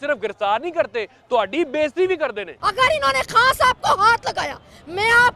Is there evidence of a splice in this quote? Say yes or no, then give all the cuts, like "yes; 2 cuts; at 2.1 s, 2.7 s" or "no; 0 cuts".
yes; 1 cut; at 2.5 s